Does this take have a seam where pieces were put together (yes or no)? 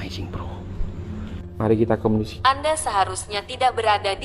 yes